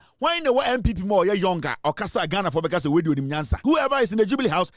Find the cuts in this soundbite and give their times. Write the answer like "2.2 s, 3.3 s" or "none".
3.5 s